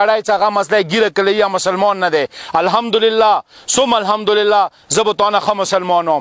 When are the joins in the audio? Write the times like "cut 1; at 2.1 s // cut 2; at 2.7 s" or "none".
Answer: none